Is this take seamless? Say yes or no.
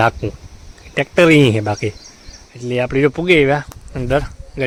yes